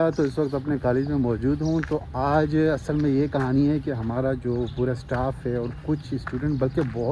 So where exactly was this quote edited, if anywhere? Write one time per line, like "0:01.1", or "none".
none

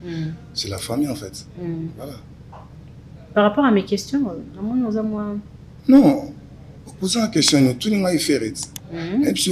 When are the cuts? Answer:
none

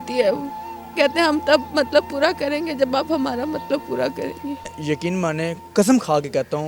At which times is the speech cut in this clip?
0:04.7

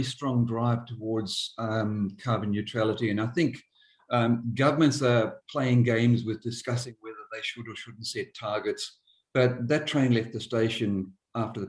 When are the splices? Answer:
none

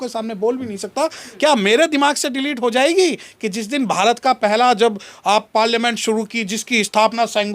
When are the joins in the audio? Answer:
0:01.2

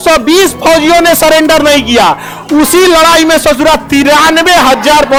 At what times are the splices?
none

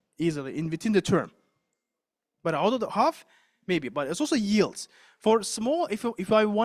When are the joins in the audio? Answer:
none

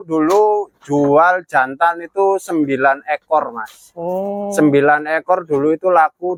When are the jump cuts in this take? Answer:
none

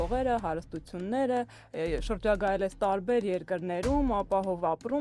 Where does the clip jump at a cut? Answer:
none

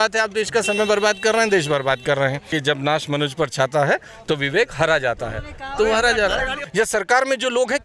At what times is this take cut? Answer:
0:02.5
0:06.6

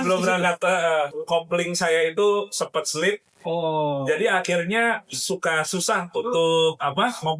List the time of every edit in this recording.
0:01.1

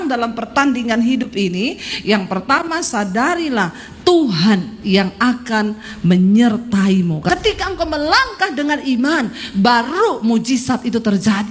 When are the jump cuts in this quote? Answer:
0:07.3

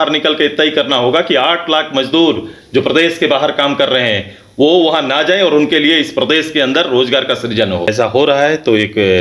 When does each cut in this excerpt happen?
0:07.9

